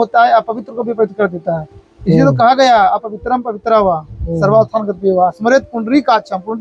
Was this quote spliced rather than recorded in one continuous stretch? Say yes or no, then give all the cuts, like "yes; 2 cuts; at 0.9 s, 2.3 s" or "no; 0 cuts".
no; 0 cuts